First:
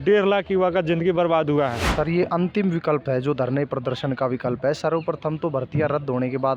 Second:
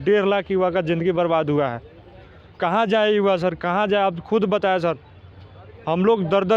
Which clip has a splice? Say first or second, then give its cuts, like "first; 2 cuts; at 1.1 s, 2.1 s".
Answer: first; 1 cut; at 1.8 s